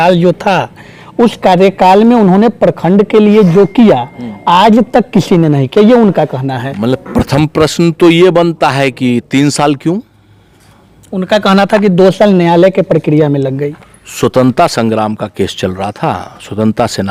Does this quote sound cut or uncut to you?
uncut